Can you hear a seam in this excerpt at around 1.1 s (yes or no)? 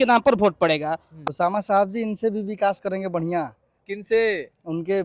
yes